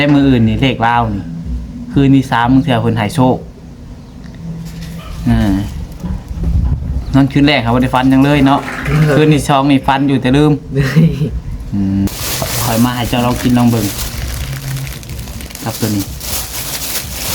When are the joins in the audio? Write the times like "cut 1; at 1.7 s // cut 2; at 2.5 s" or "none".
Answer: cut 1; at 12.1 s

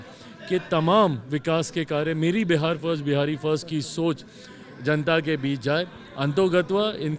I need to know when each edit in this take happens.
none

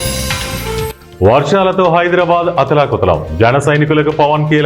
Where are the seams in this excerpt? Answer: cut 1; at 1.0 s

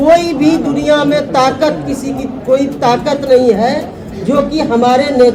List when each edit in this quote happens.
none

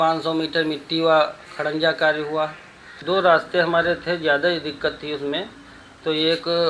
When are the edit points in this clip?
cut 1; at 3.0 s

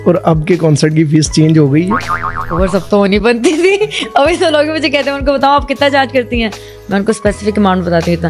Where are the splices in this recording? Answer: none

